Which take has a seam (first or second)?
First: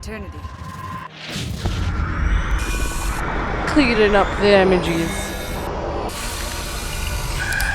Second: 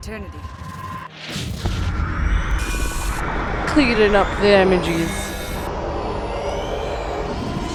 first